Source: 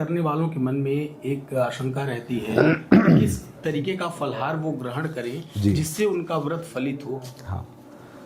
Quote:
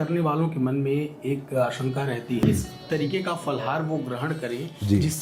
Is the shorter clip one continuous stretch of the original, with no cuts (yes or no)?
no